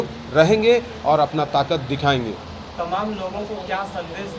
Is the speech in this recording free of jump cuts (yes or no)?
yes